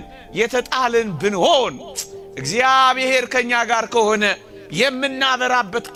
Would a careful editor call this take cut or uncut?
uncut